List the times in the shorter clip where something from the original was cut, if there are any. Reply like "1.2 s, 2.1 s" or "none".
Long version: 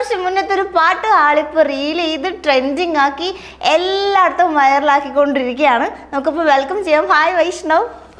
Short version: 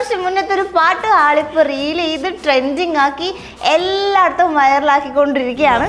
none